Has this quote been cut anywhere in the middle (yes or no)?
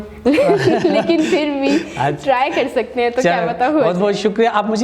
no